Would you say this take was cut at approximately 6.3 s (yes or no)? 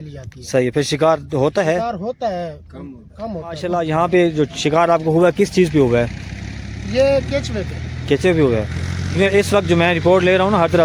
no